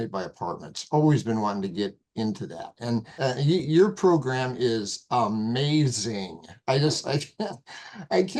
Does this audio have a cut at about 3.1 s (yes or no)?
yes